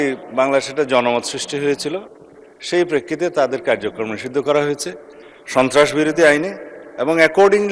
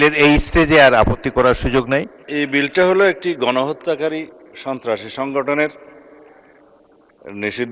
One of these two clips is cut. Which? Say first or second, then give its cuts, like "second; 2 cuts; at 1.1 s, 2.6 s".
second; 1 cut; at 2.2 s